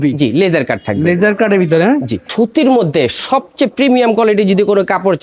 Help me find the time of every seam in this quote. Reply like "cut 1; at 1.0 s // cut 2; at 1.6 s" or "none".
cut 1; at 2.3 s